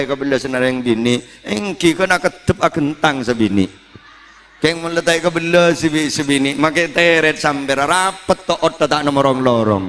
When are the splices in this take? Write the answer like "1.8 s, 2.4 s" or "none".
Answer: none